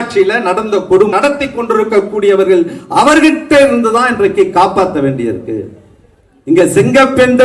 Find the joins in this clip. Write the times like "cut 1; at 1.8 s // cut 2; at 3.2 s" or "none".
cut 1; at 1.1 s